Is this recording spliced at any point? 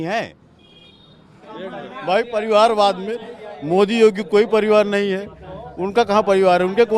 yes; 1 cut; at 1.5 s

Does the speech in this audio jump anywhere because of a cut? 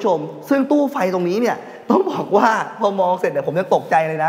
no; 0 cuts

